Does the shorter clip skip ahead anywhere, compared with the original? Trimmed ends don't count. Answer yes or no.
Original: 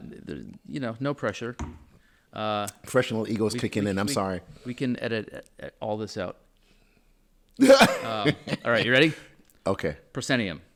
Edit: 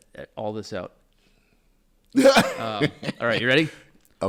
no